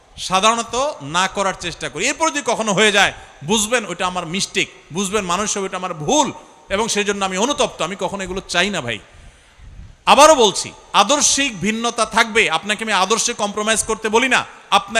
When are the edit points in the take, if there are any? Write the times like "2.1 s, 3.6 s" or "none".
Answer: none

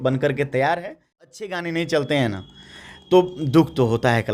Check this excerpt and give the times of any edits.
1.4 s

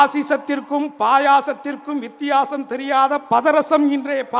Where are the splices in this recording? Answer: none

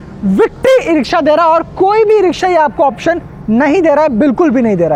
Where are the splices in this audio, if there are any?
none

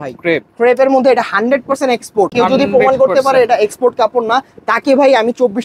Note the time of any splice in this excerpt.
2.3 s

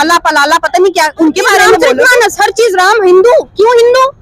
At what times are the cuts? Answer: 1.7 s

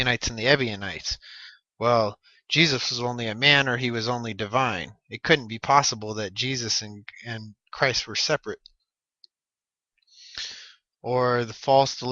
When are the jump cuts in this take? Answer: 1.9 s

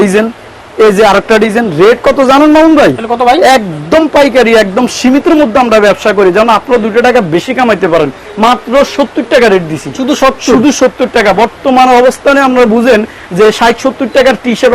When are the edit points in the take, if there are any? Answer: none

